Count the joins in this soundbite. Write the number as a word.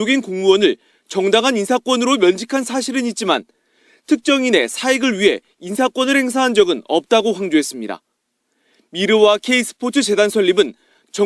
one